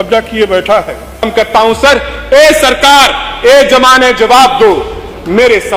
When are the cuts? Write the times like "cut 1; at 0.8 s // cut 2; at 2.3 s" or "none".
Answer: cut 1; at 1.2 s